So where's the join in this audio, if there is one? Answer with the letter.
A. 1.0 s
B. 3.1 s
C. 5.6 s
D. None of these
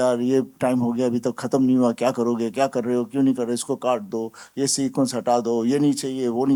D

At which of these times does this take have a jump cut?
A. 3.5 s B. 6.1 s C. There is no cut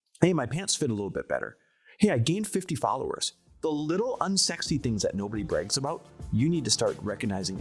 A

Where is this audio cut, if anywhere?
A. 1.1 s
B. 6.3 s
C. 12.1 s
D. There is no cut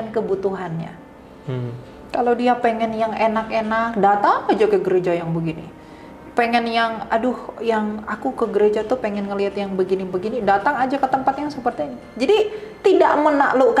D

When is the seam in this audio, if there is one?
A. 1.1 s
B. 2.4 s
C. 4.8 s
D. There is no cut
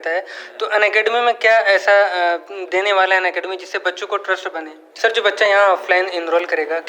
C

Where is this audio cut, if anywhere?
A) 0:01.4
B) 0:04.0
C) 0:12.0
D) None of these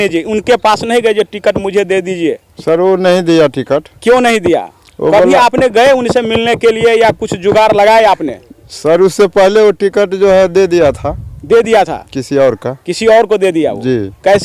D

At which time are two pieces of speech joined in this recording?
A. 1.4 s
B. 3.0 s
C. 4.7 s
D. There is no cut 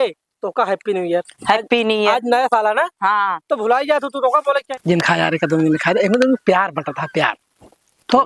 C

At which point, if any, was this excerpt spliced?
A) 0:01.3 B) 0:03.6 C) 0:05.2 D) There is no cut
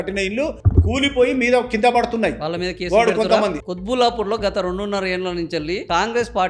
B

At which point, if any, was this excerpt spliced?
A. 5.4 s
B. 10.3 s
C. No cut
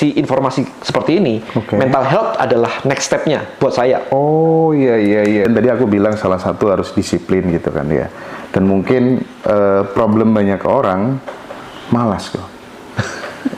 A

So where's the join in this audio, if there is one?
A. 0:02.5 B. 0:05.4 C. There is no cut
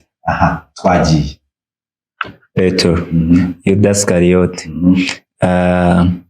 A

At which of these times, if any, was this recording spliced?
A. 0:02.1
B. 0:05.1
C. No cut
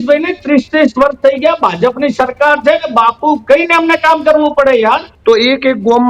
B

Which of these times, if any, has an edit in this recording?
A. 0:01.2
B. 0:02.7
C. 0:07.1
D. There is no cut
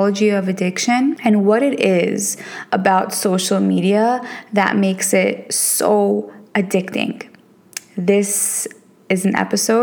A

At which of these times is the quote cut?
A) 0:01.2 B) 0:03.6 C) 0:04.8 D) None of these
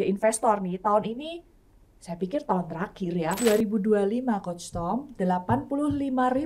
B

